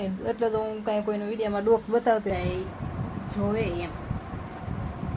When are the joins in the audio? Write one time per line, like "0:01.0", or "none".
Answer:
0:02.3